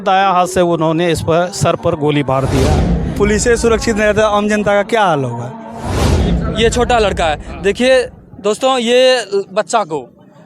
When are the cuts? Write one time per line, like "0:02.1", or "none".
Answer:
0:03.0
0:06.2